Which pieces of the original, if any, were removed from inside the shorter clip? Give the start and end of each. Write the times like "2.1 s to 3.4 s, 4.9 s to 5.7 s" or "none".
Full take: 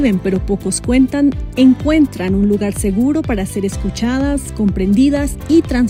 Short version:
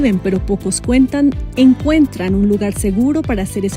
none